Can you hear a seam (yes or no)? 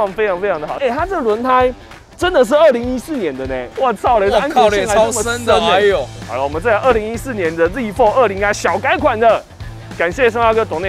yes